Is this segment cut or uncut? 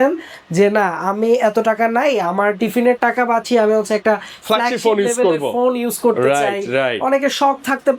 uncut